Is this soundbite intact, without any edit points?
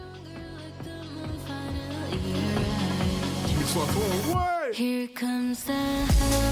yes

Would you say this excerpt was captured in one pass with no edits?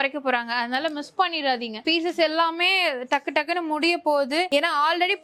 yes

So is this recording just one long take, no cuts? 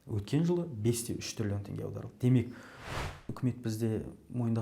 no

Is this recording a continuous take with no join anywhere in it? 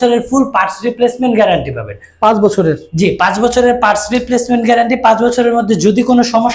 yes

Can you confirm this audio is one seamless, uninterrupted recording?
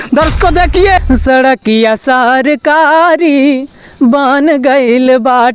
no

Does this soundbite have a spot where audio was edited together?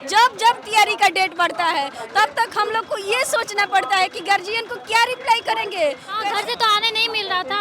yes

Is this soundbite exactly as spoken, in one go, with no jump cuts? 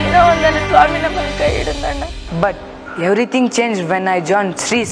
no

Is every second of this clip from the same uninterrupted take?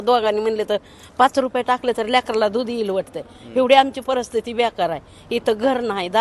yes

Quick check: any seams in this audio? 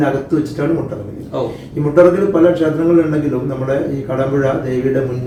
no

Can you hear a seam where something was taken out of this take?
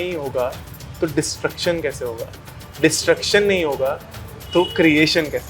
no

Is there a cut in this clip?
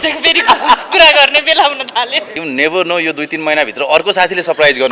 yes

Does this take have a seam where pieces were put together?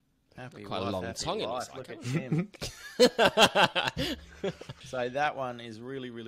yes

